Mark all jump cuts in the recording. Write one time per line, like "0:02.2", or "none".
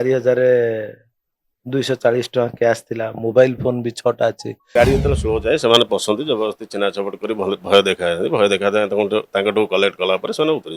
0:04.7